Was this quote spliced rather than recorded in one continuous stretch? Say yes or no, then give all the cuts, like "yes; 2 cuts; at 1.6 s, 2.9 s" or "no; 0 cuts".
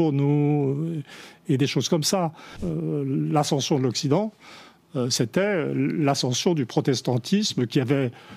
yes; 1 cut; at 2.6 s